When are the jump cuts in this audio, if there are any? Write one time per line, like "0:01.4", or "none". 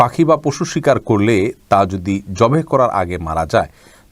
none